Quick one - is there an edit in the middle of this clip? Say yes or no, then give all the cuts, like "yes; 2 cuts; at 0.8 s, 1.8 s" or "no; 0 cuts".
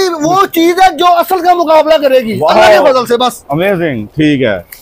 no; 0 cuts